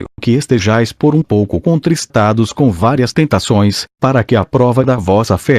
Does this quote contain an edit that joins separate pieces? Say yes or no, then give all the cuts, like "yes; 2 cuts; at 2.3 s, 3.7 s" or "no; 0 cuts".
yes; 1 cut; at 2.0 s